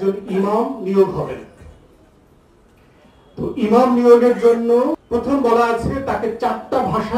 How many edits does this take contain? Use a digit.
1